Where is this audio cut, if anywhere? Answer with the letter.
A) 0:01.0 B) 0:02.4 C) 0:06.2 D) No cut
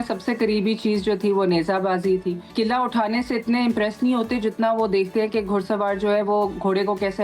B